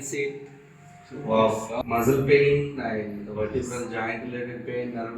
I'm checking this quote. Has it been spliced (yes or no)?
yes